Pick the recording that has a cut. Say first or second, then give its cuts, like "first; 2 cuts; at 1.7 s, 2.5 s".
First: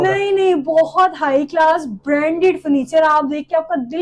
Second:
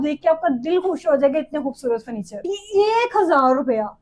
second; 1 cut; at 2.5 s